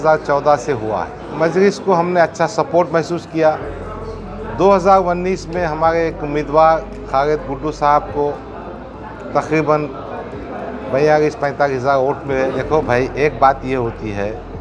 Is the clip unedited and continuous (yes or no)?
no